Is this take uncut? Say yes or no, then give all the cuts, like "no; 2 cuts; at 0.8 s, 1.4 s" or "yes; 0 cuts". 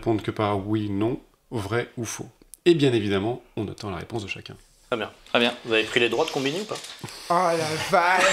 yes; 0 cuts